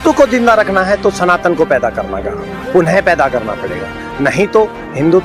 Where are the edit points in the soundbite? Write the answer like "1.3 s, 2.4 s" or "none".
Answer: none